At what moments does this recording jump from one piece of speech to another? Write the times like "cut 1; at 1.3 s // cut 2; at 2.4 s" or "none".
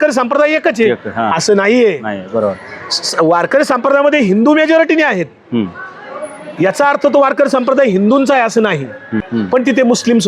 cut 1; at 9.3 s